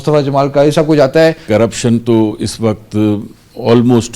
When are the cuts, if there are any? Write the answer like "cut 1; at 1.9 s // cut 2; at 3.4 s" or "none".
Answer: cut 1; at 1.4 s